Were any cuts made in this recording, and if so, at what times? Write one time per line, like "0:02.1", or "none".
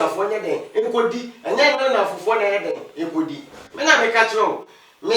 none

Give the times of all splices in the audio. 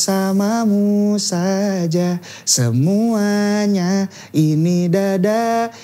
none

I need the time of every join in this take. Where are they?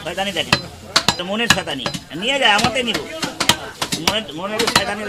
0:01.2

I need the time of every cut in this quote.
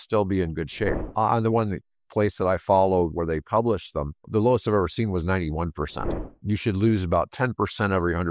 0:06.3

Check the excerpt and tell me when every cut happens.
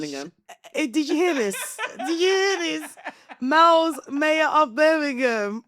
none

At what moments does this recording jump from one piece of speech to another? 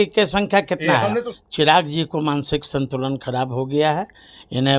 0:01.3

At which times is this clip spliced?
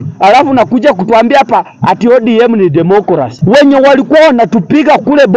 0:03.3

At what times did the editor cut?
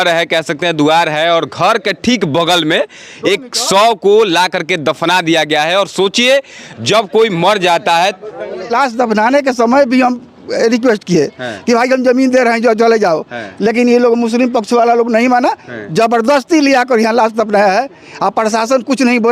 0:08.7

